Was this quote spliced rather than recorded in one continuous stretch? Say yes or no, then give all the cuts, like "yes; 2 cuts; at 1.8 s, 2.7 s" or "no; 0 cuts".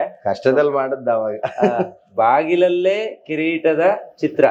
no; 0 cuts